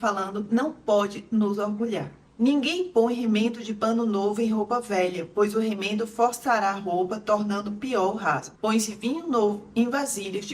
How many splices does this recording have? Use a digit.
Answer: 2